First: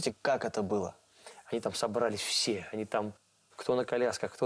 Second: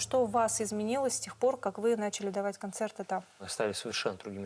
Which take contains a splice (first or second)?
second